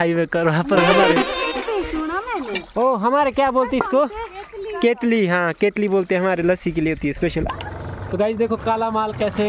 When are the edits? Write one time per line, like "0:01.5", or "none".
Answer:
0:07.5